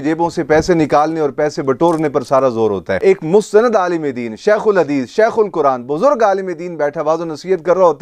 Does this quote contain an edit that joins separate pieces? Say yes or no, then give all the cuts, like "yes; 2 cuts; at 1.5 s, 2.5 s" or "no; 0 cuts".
yes; 1 cut; at 3.0 s